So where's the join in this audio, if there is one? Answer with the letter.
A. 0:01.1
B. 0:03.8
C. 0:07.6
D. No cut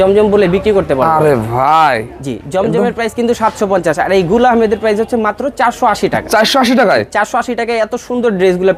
D